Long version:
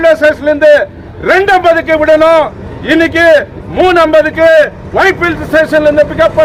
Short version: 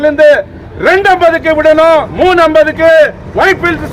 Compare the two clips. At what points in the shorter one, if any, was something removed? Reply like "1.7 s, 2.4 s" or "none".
2.1 s